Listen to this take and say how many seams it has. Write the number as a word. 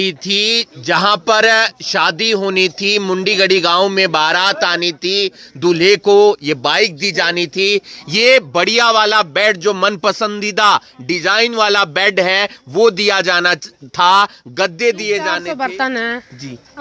one